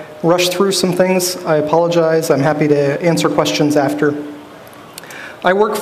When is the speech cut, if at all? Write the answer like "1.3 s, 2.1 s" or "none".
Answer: none